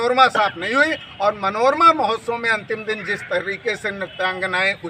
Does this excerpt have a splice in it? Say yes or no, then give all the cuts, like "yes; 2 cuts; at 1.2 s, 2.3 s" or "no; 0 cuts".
no; 0 cuts